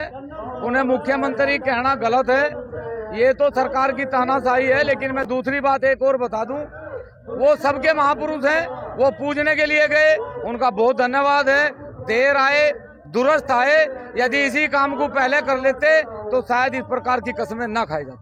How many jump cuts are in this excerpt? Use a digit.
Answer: 0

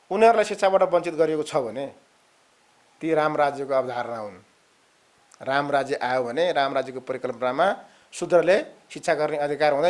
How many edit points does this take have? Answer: 0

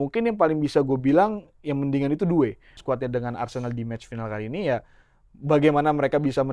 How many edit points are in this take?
1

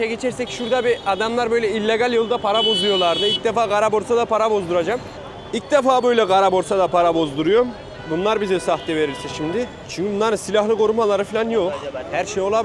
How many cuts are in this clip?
1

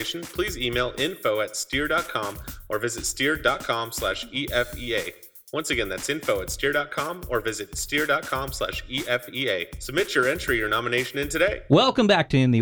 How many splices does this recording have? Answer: 1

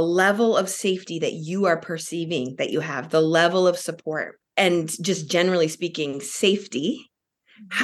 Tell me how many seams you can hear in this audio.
1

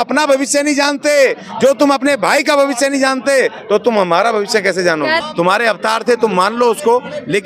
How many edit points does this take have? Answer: 1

